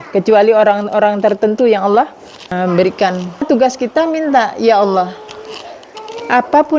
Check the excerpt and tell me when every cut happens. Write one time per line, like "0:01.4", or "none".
0:02.5
0:03.5